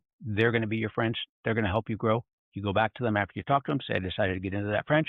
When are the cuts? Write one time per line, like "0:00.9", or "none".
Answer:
none